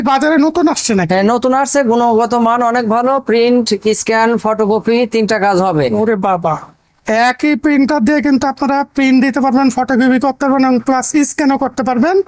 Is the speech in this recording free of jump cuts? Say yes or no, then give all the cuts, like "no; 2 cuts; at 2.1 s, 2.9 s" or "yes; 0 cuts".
yes; 0 cuts